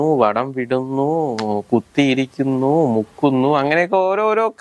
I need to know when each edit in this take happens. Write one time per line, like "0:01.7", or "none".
none